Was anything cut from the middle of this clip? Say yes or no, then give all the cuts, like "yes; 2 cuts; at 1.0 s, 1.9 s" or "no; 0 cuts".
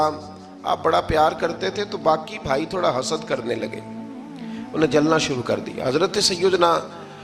no; 0 cuts